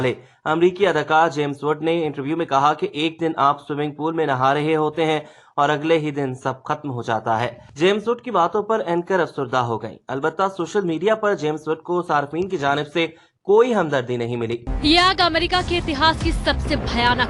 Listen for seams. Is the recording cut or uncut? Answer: cut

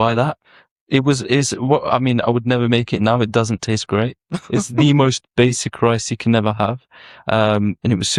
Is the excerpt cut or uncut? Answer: uncut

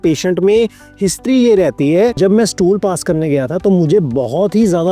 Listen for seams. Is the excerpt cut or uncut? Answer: cut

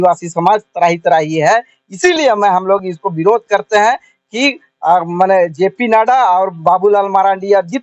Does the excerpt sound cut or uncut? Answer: uncut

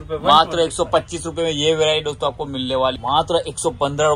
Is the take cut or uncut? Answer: cut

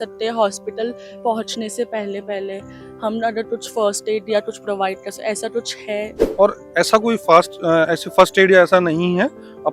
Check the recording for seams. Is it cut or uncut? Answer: cut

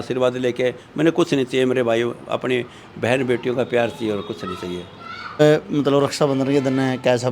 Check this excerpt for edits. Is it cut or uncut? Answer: cut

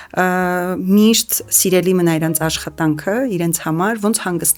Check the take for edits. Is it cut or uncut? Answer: uncut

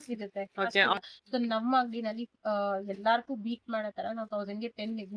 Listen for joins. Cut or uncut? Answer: cut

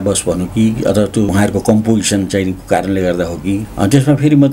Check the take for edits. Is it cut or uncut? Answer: cut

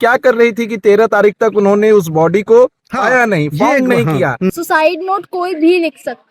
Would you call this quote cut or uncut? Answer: cut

